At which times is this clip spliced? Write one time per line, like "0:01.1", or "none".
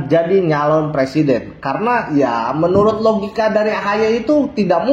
none

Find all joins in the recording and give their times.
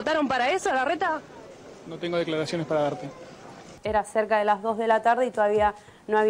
0:03.8

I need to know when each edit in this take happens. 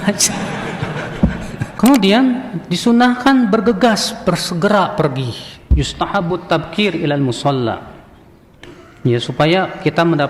0:01.7

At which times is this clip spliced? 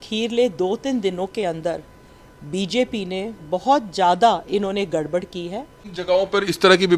0:05.9

